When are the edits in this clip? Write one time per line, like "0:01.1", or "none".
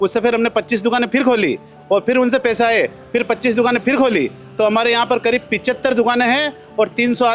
none